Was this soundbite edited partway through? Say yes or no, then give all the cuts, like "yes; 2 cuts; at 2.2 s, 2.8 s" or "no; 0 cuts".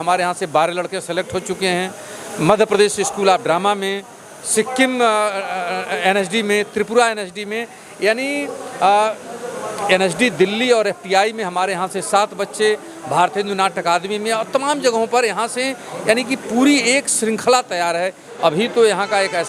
yes; 1 cut; at 18.3 s